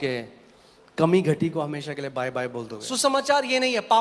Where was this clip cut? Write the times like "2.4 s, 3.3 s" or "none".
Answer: 2.8 s